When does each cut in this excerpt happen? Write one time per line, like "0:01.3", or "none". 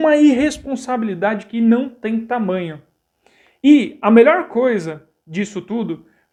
none